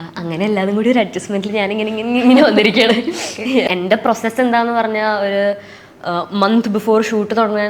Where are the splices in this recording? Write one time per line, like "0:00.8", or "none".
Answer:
0:03.7